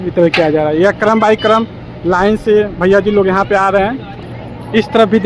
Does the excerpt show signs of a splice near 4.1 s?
yes; 1 cut; at 4.1 s

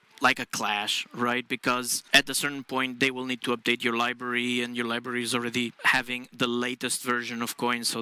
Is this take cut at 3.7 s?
no; 2 cuts; at 2.0 s, 5.8 s

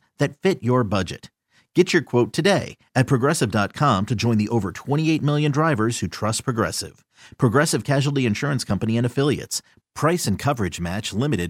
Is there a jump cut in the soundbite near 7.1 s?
no; 0 cuts

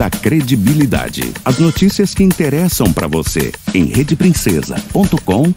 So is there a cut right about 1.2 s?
no; 0 cuts

